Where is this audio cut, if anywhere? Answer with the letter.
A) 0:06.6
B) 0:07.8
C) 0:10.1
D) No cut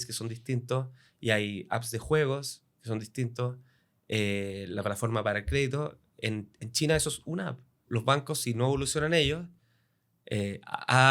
B